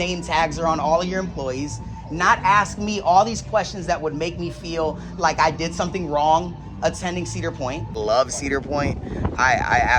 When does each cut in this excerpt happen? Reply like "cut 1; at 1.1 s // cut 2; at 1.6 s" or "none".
cut 1; at 8.0 s